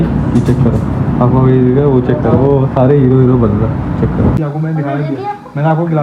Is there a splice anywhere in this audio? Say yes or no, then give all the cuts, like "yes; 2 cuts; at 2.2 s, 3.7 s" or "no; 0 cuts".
yes; 1 cut; at 4.4 s